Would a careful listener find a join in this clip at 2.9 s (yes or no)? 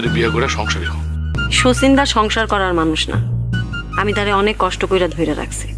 no